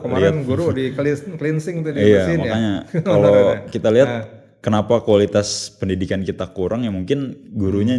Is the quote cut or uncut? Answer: uncut